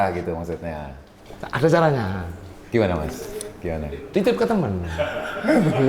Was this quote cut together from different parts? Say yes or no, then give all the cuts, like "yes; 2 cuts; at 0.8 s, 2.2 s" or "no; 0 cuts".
yes; 1 cut; at 4.0 s